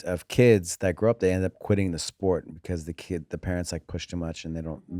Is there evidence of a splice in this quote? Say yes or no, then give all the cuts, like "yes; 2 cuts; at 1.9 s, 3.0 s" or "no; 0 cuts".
no; 0 cuts